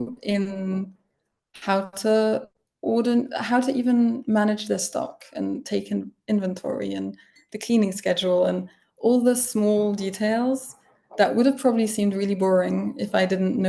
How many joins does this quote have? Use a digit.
0